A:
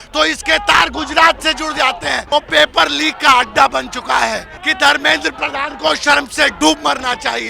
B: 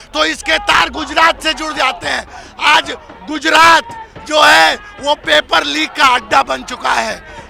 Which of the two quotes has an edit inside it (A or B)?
A